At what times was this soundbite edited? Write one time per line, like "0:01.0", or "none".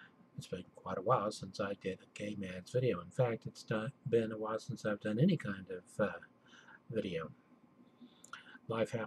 none